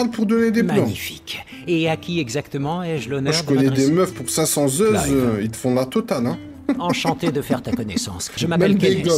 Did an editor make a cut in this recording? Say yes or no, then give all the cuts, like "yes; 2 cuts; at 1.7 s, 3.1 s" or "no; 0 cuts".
yes; 1 cut; at 8.2 s